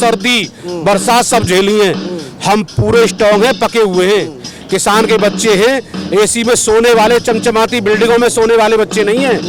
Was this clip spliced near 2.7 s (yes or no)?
no